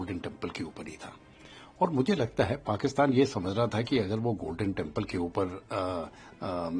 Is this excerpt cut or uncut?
uncut